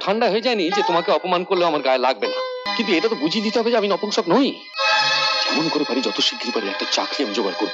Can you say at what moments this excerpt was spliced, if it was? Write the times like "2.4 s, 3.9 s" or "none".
2.7 s, 4.7 s